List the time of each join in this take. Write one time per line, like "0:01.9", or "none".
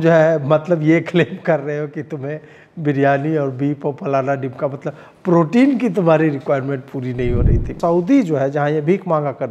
0:07.7